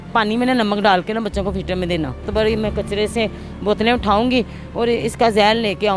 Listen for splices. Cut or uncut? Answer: cut